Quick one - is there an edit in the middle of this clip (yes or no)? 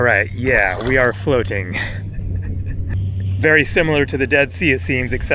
yes